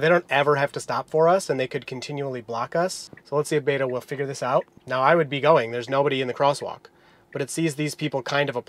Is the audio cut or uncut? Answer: cut